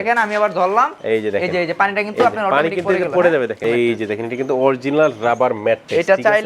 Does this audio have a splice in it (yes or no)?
yes